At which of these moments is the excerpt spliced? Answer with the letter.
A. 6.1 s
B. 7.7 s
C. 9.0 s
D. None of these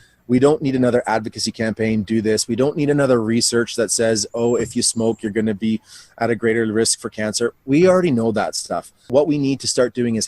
C